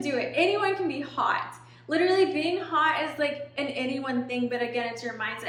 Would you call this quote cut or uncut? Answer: uncut